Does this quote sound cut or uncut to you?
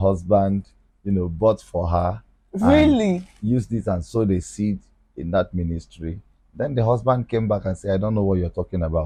uncut